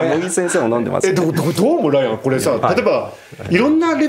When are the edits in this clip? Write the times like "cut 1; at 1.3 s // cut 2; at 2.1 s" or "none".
none